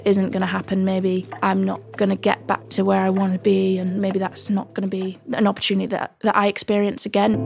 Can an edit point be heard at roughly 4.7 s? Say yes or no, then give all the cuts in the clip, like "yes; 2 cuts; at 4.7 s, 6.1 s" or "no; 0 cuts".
no; 0 cuts